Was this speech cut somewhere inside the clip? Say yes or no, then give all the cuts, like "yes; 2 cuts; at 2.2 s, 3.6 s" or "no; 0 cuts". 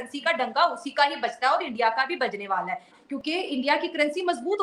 no; 0 cuts